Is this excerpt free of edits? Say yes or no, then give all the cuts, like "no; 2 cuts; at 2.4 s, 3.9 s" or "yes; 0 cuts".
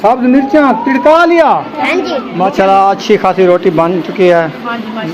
no; 1 cut; at 2.2 s